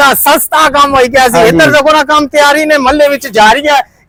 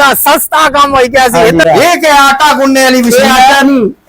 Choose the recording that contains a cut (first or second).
second